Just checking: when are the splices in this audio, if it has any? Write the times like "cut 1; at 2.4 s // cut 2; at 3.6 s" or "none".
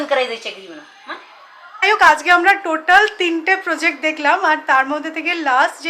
cut 1; at 1.8 s